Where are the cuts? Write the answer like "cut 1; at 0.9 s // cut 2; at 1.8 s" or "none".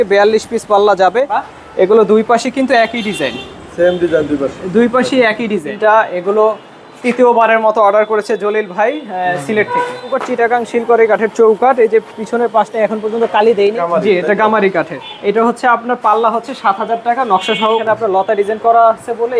cut 1; at 1.4 s // cut 2; at 5.7 s // cut 3; at 10.2 s // cut 4; at 13.8 s // cut 5; at 17.8 s